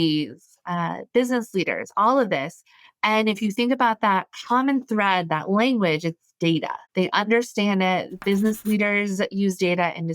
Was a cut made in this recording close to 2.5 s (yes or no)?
no